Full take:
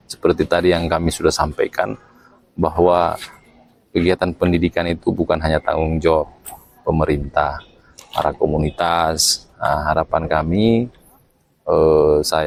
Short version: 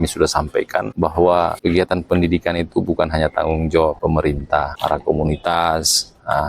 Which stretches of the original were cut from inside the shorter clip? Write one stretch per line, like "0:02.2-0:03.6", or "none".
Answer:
0:01.9-0:02.5
0:03.2-0:03.9
0:06.6-0:07.7